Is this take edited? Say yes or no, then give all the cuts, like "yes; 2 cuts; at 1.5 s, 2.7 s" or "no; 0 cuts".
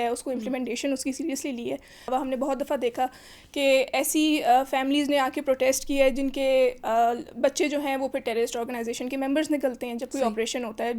yes; 1 cut; at 2.1 s